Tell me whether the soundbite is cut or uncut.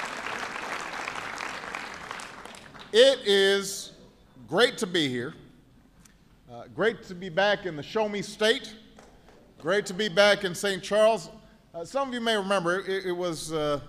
uncut